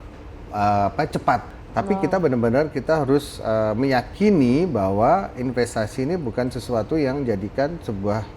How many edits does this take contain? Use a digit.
1